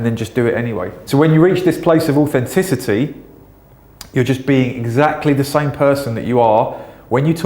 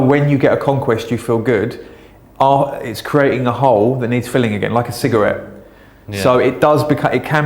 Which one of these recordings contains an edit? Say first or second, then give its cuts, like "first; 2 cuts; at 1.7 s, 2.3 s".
first; 1 cut; at 1.0 s